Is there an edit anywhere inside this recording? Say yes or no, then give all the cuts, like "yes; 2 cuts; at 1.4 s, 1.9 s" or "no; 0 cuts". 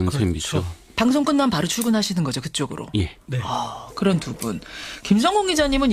no; 0 cuts